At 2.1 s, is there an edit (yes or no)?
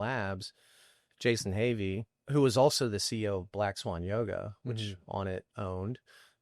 yes